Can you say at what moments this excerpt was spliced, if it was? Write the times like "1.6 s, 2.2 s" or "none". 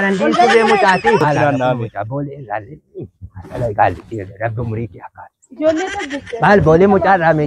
1.2 s